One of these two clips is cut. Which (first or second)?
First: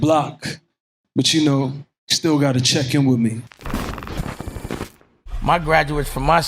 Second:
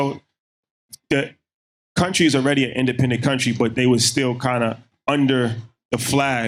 first